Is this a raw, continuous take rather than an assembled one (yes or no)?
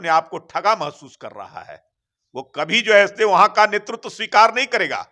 yes